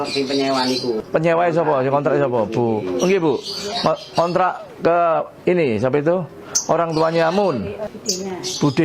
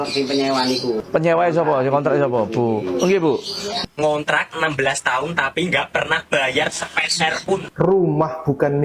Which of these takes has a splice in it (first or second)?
second